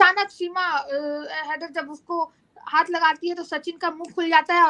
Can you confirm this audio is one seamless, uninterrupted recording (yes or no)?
yes